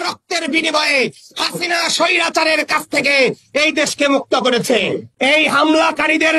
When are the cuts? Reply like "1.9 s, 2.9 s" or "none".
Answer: 5.1 s